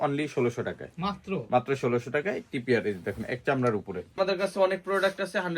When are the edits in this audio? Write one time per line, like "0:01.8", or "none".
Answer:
0:04.2

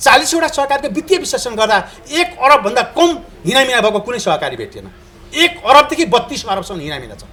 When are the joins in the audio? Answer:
none

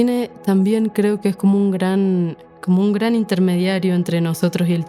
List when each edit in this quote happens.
0:02.4

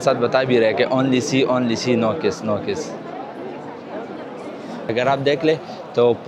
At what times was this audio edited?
0:04.8

